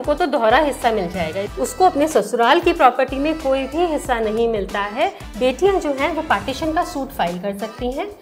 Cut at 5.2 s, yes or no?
yes